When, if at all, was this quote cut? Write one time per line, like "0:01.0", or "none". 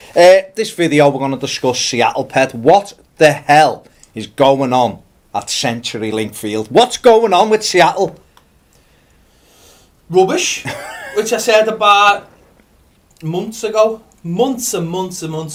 none